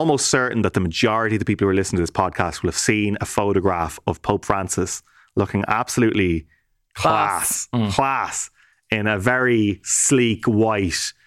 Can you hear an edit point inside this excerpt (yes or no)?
no